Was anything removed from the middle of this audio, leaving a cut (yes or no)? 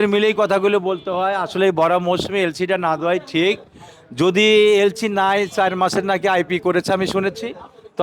no